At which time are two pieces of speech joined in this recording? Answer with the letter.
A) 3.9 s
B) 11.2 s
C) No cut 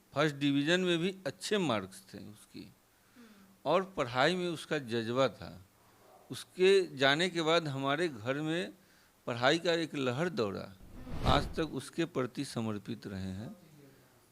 B